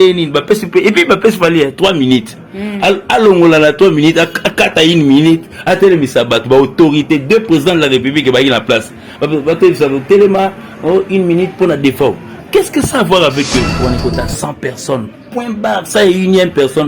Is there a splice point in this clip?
yes; 1 cut; at 13.8 s

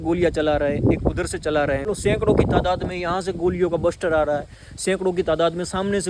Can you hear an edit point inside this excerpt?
yes; 1 cut; at 1.8 s

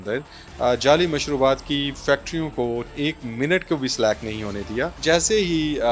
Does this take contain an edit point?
yes; 2 cuts; at 3.0 s, 5.0 s

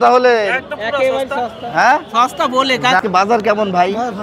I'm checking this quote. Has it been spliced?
yes; 1 cut; at 3.0 s

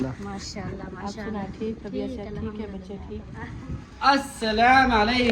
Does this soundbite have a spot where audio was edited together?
yes; 1 cut; at 3.3 s

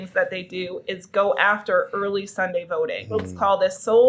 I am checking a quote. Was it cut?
yes; 1 cut; at 3.2 s

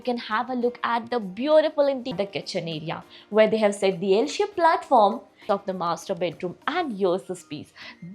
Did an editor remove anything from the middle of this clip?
yes; 2 cuts; at 2.1 s, 5.3 s

